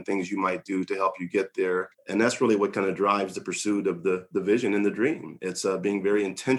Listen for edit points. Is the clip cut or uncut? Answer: cut